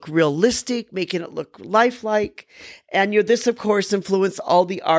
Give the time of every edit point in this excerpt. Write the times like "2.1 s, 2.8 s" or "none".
none